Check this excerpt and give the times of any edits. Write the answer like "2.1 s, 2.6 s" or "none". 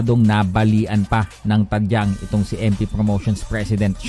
none